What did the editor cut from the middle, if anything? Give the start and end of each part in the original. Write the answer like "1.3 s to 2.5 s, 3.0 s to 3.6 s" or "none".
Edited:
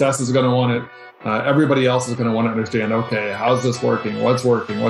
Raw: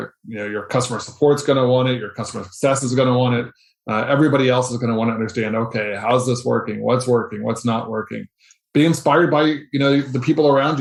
none